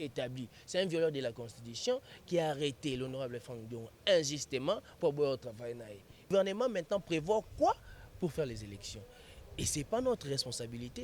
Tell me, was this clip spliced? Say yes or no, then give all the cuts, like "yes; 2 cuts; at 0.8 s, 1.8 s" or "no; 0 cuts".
yes; 1 cut; at 6.2 s